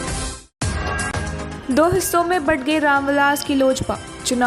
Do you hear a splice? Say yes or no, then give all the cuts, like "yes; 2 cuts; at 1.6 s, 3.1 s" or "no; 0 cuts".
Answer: yes; 1 cut; at 1.5 s